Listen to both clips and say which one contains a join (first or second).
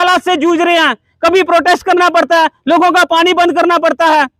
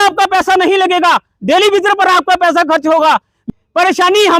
second